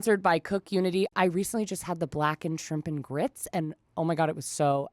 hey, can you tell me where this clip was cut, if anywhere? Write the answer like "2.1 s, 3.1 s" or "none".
1.1 s